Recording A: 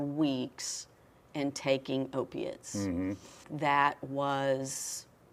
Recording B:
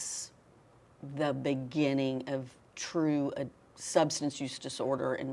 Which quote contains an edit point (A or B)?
A